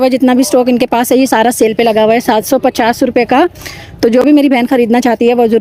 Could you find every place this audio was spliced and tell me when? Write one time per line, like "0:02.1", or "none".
none